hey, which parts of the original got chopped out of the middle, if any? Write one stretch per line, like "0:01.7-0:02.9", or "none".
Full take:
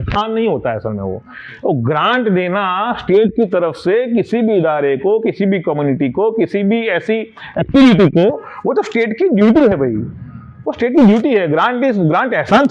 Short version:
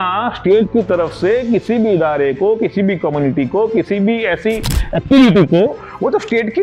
none